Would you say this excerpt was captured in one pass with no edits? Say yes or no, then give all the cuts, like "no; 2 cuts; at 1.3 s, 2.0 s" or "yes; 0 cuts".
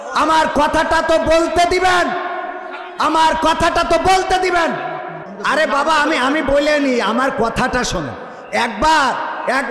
no; 1 cut; at 5.2 s